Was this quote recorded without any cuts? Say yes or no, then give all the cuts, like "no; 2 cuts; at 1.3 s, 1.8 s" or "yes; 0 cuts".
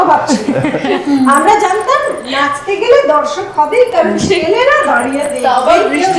yes; 0 cuts